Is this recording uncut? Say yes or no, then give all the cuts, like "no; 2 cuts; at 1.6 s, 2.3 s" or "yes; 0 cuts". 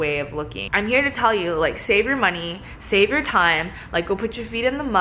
yes; 0 cuts